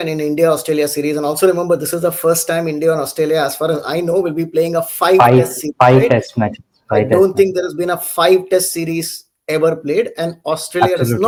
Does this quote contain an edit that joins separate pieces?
no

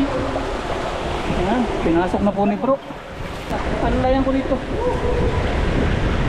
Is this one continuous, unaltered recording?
no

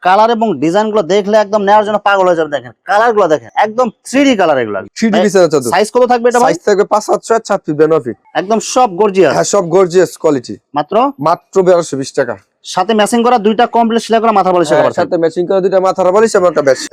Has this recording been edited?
no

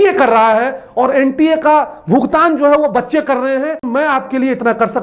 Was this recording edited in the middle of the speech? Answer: yes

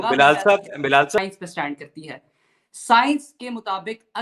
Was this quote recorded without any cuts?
no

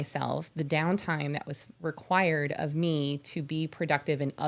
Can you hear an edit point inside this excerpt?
no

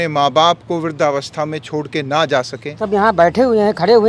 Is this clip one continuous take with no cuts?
no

